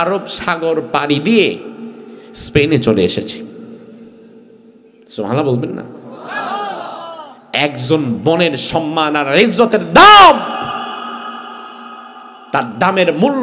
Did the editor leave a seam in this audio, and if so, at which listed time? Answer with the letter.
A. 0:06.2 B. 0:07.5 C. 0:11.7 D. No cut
D